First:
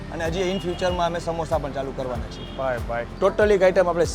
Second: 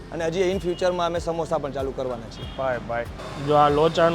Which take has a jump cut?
first; 1 cut; at 3.1 s

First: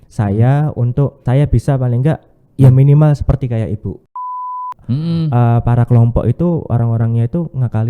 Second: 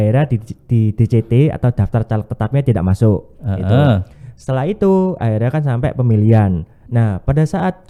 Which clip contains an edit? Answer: first; 2 cuts; at 1.2 s, 4.4 s

